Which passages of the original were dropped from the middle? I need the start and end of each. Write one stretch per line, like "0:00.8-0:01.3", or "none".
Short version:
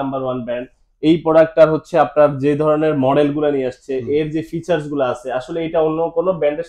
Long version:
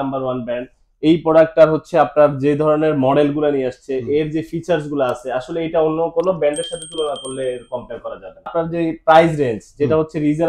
none